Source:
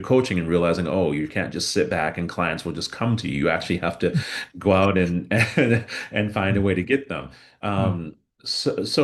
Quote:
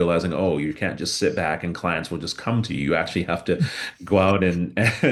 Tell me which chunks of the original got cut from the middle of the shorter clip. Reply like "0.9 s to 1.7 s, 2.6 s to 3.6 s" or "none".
none